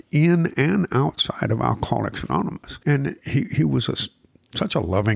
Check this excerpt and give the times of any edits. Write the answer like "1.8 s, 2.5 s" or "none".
2.7 s